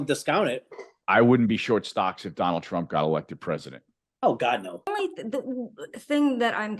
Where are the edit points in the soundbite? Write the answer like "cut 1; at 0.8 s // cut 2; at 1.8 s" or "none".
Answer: cut 1; at 1.0 s // cut 2; at 4.9 s